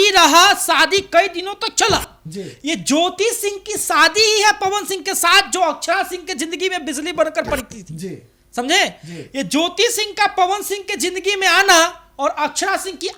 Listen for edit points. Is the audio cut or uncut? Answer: uncut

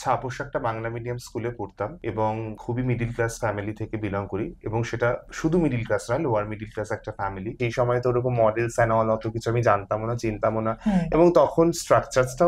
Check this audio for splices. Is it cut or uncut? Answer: cut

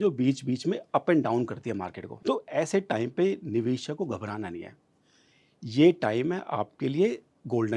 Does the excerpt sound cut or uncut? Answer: uncut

